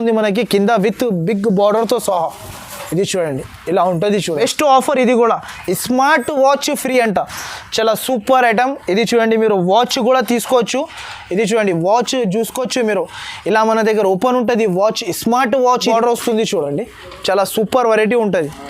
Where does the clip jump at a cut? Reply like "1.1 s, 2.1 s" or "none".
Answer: 4.4 s, 15.9 s